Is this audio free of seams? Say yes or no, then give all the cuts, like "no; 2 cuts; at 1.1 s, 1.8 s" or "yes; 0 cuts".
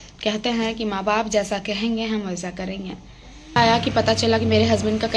no; 1 cut; at 3.6 s